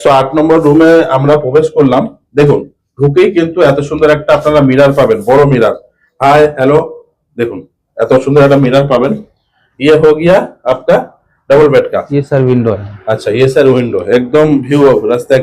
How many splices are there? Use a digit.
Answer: 0